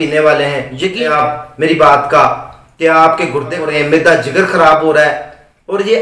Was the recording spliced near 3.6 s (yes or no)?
yes